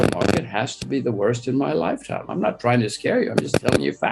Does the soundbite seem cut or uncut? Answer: uncut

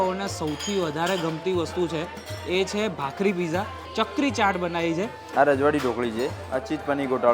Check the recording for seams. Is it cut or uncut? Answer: cut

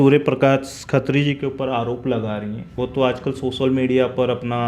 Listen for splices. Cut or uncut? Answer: cut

